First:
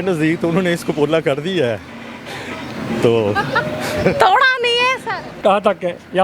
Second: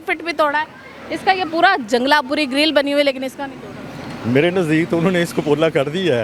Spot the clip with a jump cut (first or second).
first